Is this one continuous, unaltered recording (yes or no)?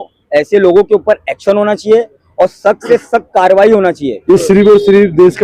no